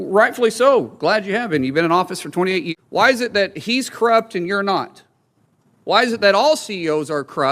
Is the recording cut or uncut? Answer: cut